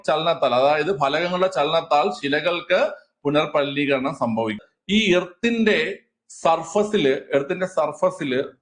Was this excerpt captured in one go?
no; 1 cut; at 4.6 s

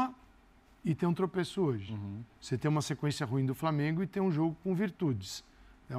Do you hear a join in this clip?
no; 0 cuts

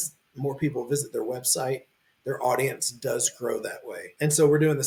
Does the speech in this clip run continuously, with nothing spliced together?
yes; 0 cuts

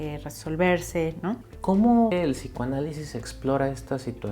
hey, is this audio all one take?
no; 2 cuts; at 1.5 s, 2.1 s

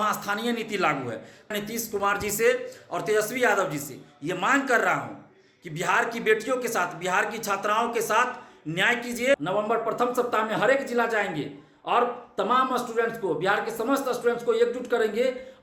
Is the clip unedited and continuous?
no; 2 cuts; at 1.5 s, 9.4 s

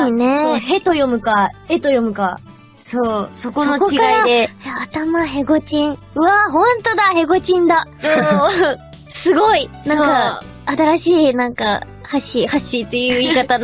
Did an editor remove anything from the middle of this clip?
no; 0 cuts

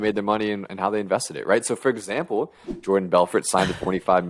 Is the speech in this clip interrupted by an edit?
no; 0 cuts

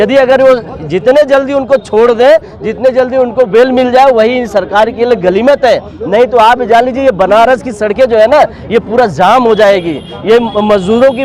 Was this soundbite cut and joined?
no; 0 cuts

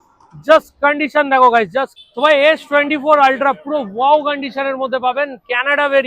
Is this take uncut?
no; 1 cut; at 2.1 s

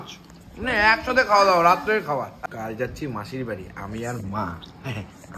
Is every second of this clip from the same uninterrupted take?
no; 1 cut; at 2.4 s

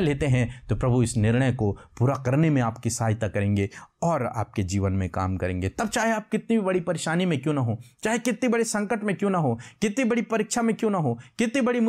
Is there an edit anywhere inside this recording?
no; 0 cuts

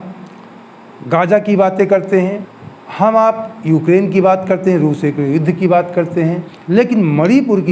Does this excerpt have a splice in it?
yes; 2 cuts; at 2.5 s, 6.5 s

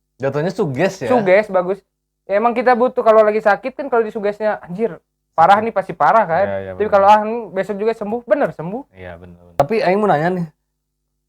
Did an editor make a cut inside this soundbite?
yes; 1 cut; at 9.6 s

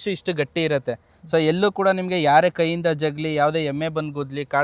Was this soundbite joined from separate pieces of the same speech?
no; 0 cuts

